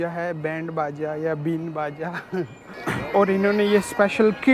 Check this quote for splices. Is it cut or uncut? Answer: cut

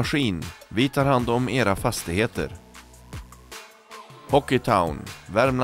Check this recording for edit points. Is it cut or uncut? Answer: uncut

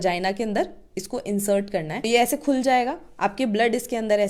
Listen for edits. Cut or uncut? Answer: uncut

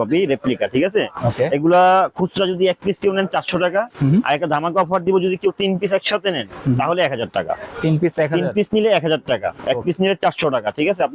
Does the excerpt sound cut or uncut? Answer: uncut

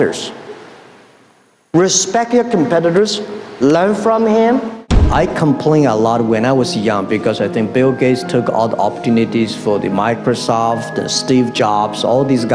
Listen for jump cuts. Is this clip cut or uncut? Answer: cut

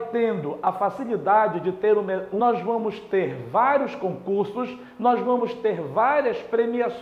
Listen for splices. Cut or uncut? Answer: cut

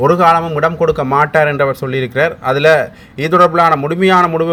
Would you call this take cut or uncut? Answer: uncut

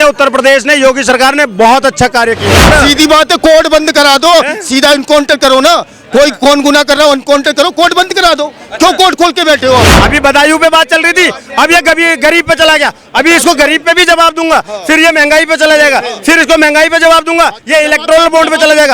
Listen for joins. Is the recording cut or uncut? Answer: cut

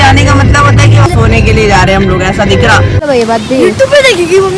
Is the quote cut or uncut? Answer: cut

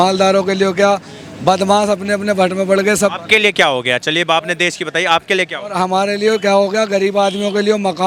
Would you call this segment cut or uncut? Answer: uncut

